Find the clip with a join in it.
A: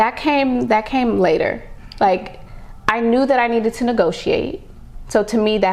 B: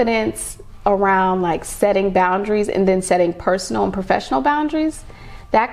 A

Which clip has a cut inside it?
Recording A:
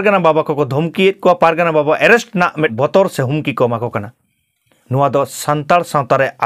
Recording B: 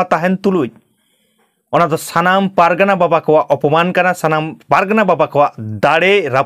A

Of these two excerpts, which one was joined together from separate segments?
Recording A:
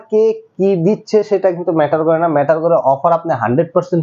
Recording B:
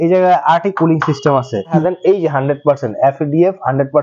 B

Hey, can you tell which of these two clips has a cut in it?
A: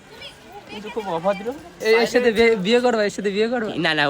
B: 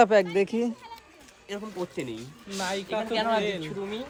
A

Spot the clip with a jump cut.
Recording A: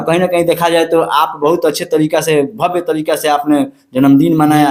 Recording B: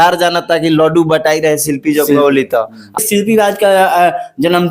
B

